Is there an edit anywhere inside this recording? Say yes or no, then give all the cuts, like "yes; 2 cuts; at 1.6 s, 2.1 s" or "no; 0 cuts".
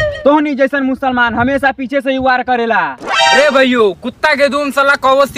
no; 0 cuts